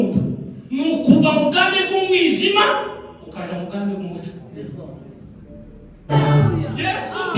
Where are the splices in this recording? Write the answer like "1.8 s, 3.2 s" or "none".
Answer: 6.1 s